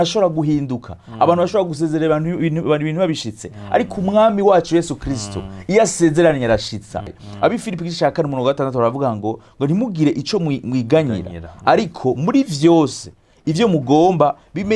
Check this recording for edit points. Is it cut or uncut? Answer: cut